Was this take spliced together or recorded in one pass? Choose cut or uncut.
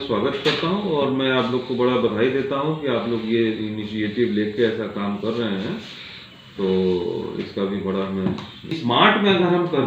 cut